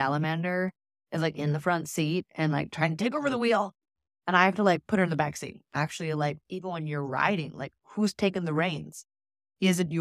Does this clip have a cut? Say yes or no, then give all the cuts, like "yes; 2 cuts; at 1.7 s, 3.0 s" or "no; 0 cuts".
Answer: yes; 1 cut; at 5.6 s